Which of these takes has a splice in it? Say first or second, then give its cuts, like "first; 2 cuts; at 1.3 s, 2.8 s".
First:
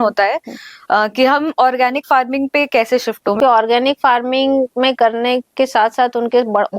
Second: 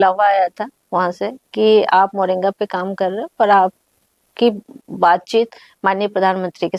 first; 1 cut; at 3.4 s